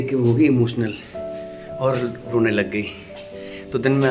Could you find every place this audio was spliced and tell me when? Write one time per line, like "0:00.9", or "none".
none